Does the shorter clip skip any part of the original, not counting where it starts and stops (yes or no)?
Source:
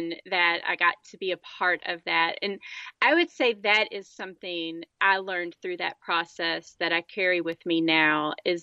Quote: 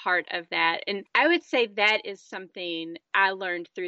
yes